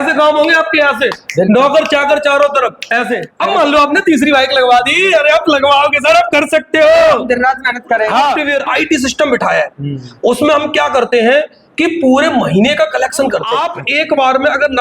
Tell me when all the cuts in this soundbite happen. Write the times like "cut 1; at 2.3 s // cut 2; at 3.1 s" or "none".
cut 1; at 3.3 s // cut 2; at 8.4 s // cut 3; at 13.7 s